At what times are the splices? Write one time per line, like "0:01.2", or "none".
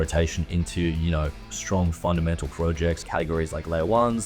0:03.0